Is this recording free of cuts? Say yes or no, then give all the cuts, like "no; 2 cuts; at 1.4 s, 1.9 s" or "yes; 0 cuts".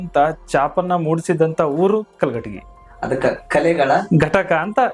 yes; 0 cuts